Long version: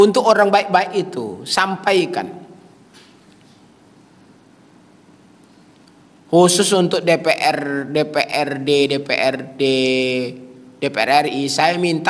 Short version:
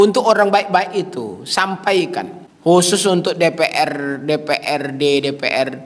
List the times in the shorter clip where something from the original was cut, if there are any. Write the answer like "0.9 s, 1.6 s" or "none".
2.4 s